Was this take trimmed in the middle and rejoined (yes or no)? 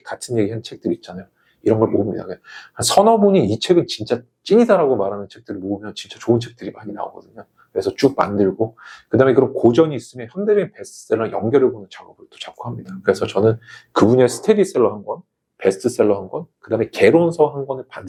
no